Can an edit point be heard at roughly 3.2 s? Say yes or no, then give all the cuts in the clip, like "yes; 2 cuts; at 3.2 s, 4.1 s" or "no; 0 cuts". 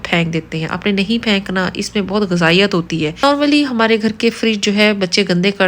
yes; 1 cut; at 3.2 s